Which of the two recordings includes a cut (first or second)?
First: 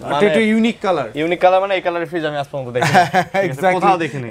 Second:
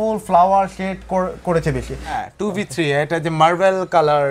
second